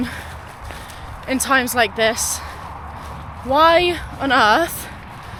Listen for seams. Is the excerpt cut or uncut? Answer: uncut